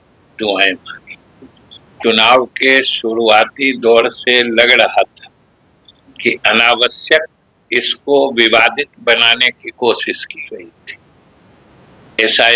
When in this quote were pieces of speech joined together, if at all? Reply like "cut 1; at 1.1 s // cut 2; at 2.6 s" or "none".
cut 1; at 1.9 s